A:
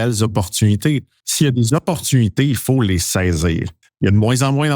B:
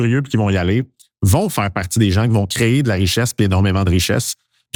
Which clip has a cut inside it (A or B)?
A